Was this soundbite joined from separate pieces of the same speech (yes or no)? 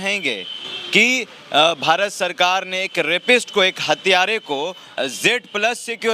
no